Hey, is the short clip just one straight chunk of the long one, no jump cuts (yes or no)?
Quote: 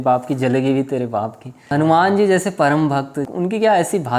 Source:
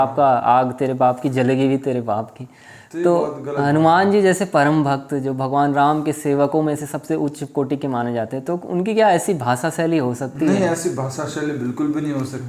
no